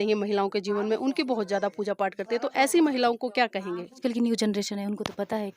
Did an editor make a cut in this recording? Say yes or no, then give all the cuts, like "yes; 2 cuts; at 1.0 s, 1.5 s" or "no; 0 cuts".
yes; 1 cut; at 4.0 s